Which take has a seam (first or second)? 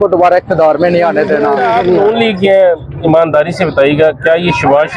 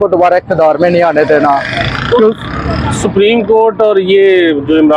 first